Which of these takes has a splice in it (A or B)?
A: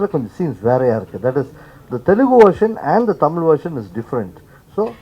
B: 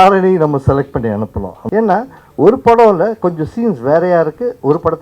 B